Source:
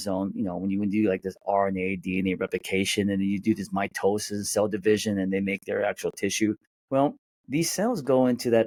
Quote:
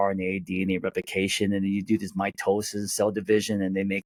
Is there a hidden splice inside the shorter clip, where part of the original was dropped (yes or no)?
no